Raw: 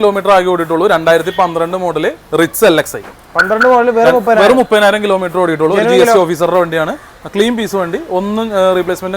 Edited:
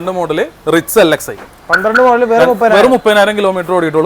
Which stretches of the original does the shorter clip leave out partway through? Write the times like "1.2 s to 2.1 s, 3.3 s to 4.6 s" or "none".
none